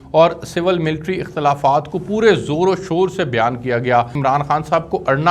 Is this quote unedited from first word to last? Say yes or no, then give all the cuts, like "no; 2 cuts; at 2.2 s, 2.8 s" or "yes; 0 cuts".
no; 1 cut; at 4.1 s